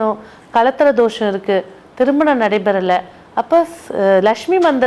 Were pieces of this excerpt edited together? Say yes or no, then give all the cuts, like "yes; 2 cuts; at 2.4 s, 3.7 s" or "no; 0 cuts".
no; 0 cuts